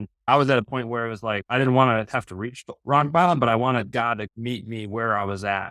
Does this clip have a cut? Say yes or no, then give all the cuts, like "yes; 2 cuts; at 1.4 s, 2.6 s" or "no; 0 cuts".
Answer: no; 0 cuts